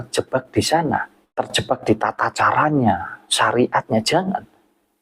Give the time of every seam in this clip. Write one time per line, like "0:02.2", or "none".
0:01.2